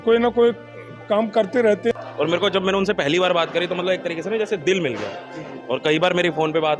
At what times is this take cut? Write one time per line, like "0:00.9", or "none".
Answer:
0:01.9